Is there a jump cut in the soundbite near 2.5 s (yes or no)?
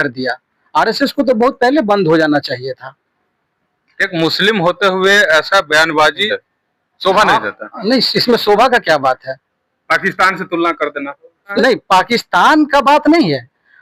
no